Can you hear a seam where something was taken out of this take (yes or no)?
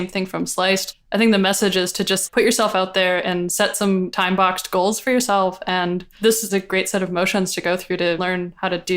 yes